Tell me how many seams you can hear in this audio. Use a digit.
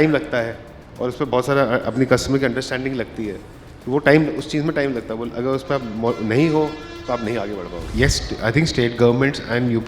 1